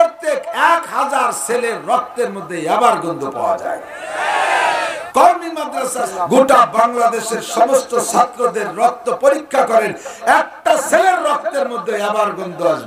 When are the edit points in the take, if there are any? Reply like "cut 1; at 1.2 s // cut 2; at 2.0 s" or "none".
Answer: cut 1; at 5.0 s // cut 2; at 6.0 s